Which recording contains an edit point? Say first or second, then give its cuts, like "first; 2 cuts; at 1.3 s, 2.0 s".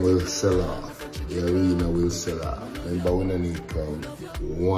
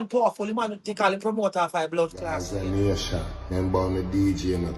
second; 1 cut; at 2.3 s